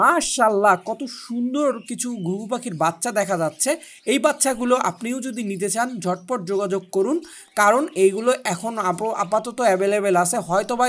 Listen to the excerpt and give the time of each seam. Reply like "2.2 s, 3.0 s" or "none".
none